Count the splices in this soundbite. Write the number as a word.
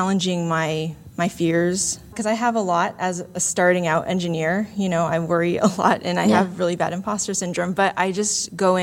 one